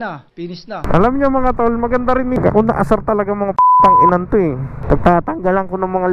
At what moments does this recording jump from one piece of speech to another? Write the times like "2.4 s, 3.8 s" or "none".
2.4 s